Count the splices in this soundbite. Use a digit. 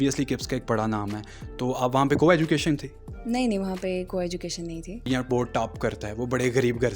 1